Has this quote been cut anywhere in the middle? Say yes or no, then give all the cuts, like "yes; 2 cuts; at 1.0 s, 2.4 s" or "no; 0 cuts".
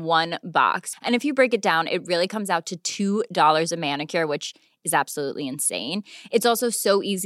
no; 0 cuts